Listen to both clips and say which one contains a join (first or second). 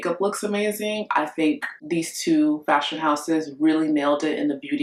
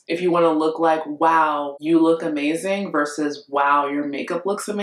second